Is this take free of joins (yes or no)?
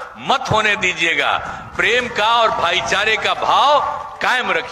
yes